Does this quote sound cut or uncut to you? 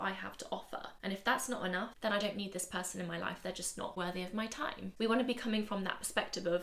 cut